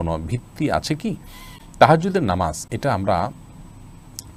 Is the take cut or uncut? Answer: uncut